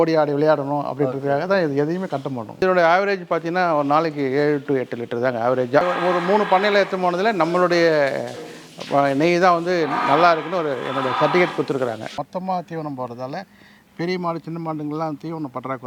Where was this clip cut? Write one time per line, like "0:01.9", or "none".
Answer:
0:02.6
0:05.8
0:12.1